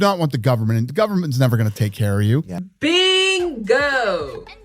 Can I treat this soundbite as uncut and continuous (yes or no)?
no